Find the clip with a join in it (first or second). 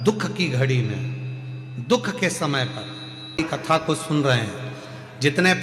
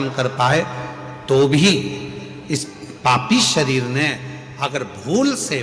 first